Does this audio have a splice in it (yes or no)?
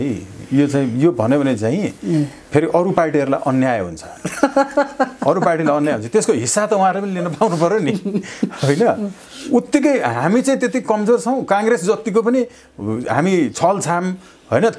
no